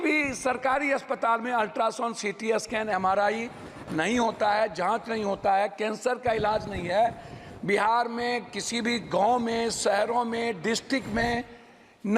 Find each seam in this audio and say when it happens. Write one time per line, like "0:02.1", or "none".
none